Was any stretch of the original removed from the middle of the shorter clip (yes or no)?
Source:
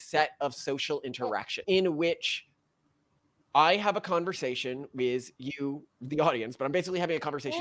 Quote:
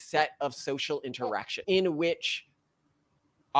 no